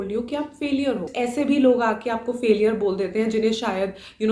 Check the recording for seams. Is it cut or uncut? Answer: cut